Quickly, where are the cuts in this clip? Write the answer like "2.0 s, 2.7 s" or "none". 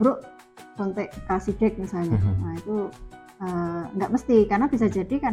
none